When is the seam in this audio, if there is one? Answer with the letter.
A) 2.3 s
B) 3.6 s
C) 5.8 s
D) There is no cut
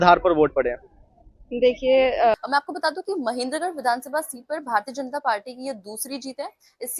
A